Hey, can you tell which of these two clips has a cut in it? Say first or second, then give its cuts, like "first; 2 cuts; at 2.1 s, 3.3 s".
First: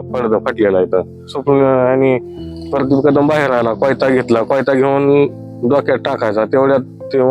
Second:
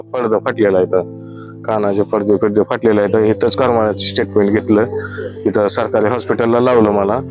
first; 1 cut; at 1.3 s